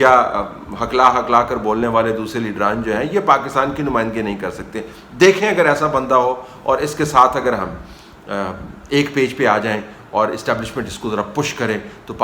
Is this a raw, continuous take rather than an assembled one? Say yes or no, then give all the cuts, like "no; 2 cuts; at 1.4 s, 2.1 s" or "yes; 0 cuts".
yes; 0 cuts